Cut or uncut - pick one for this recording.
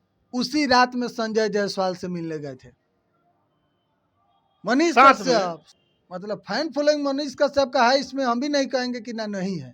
cut